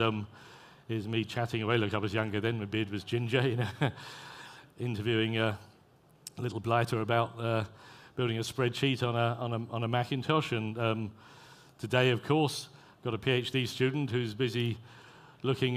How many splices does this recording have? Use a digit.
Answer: 1